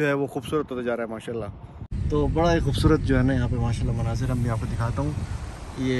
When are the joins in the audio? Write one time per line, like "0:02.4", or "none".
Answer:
0:01.7